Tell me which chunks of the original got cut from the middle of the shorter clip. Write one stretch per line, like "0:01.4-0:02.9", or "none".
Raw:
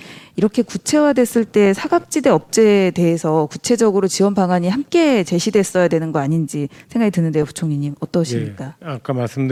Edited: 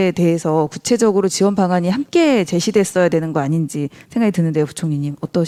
none